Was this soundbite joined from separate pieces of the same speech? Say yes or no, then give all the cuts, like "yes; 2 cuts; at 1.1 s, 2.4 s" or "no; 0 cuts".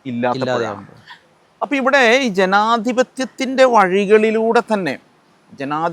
no; 0 cuts